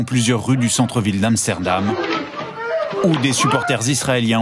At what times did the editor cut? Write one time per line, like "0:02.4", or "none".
0:00.9